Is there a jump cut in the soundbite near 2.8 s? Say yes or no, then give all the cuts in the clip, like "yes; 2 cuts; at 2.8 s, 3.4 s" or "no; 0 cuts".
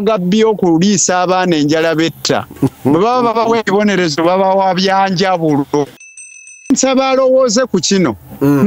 no; 1 cut; at 6.2 s